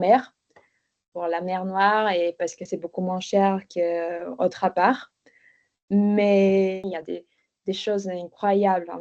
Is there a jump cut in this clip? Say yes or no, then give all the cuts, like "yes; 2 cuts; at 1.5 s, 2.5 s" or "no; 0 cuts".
yes; 1 cut; at 6.8 s